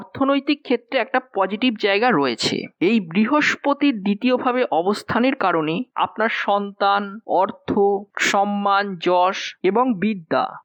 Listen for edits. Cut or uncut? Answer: uncut